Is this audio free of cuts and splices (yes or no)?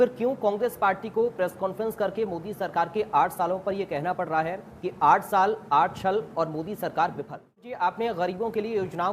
no